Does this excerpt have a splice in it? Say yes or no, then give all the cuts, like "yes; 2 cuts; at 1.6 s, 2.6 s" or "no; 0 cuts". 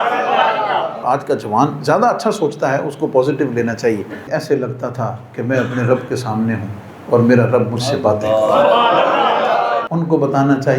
yes; 3 cuts; at 1.0 s, 4.3 s, 9.9 s